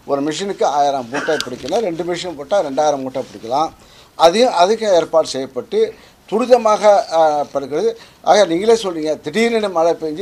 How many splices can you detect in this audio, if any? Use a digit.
0